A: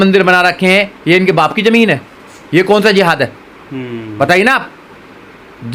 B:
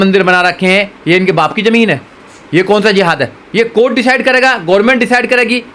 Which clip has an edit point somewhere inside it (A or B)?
B